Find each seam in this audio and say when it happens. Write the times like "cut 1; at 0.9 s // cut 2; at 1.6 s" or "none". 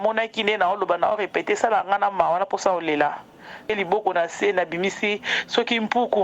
cut 1; at 3.7 s